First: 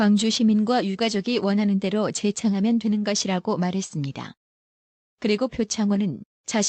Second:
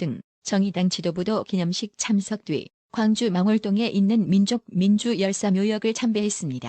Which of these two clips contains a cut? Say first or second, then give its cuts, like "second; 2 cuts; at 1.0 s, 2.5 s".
second; 1 cut; at 5.2 s